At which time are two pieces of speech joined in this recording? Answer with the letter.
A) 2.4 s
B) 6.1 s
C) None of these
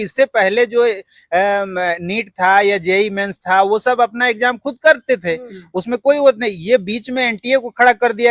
C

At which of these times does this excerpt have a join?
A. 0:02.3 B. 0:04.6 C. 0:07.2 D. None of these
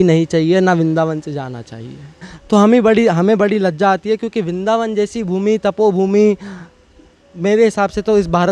A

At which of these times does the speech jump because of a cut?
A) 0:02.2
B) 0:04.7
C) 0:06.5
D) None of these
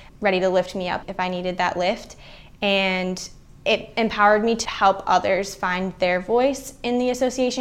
B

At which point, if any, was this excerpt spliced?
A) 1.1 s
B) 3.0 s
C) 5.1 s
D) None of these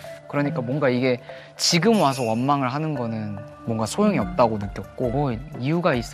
C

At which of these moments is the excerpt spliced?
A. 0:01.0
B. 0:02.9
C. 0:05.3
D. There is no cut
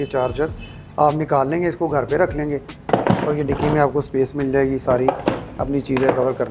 D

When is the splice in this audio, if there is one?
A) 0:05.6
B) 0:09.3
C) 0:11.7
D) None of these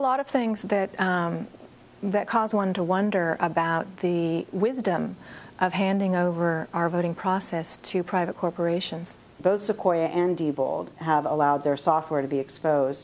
D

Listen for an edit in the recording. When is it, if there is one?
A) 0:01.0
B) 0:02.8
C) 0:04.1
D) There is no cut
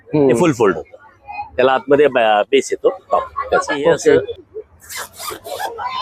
C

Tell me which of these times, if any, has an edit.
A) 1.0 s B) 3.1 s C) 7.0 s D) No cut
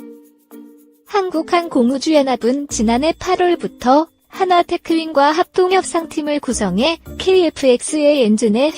A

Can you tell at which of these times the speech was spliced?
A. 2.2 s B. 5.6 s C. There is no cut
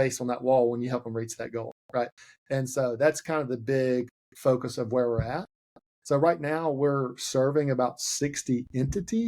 A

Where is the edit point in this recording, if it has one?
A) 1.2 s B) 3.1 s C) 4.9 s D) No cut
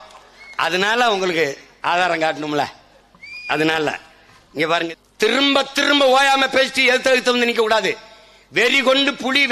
C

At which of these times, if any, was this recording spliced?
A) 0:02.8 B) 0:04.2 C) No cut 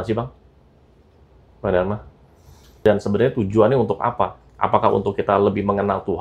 A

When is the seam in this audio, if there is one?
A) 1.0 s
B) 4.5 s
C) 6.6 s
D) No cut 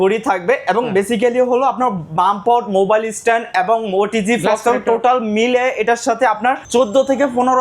C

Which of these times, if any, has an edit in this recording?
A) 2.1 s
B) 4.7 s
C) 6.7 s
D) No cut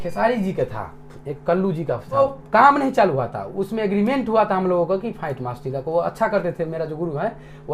D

